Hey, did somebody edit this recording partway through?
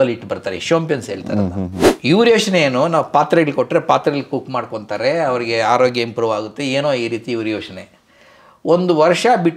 yes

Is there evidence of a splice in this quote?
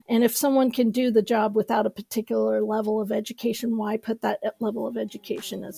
no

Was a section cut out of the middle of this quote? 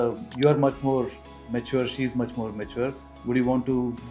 no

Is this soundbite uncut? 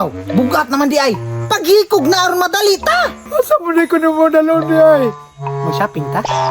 no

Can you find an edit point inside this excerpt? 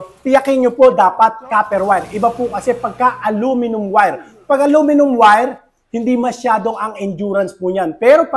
no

